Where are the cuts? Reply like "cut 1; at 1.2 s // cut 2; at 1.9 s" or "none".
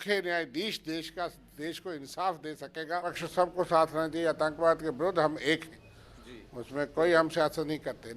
cut 1; at 3.2 s